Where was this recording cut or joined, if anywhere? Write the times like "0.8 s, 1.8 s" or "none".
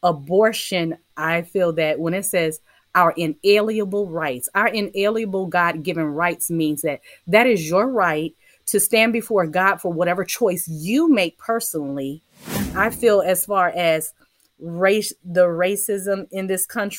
12.6 s